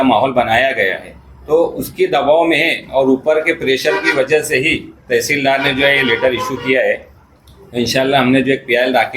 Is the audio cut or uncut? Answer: uncut